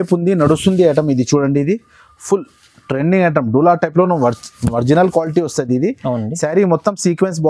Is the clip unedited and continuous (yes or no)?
yes